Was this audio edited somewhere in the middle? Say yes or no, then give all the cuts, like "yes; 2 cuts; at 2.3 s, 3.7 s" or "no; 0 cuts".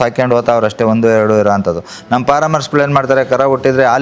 no; 0 cuts